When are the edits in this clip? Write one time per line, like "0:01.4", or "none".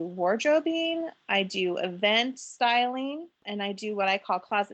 0:03.4